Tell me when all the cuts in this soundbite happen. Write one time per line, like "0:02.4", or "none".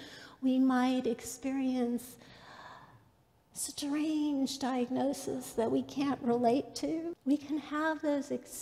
0:07.1